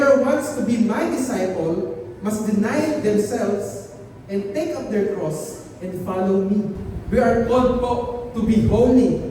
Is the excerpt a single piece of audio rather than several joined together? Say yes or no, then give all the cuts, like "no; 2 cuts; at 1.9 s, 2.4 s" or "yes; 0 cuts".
no; 2 cuts; at 3.0 s, 6.9 s